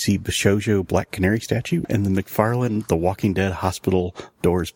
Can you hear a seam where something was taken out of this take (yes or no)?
yes